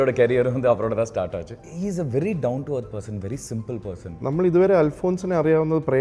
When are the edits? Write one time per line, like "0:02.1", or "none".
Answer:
0:01.6
0:04.2